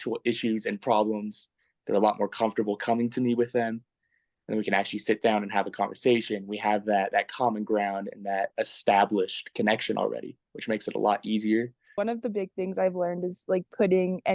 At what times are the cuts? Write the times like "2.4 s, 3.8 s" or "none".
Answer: 11.9 s